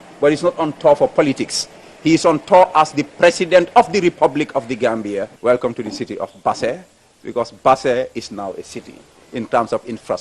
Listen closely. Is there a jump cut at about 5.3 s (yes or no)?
yes